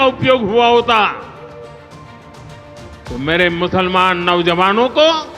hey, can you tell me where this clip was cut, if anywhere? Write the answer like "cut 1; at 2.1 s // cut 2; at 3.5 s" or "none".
none